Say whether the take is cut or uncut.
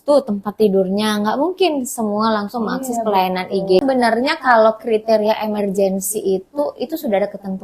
cut